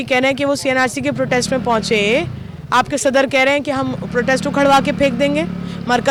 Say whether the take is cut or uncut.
uncut